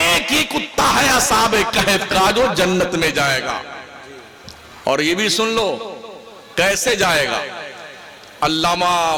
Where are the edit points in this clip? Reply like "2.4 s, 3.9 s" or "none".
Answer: none